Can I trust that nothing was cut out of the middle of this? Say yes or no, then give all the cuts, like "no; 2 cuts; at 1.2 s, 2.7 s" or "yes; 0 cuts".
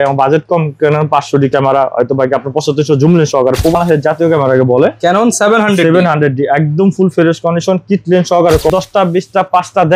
no; 2 cuts; at 3.8 s, 8.7 s